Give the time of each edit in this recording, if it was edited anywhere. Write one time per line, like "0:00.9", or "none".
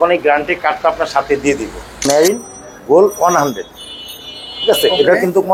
0:02.0